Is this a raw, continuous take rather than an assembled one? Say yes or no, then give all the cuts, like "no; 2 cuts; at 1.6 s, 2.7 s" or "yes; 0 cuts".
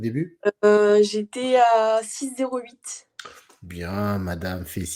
yes; 0 cuts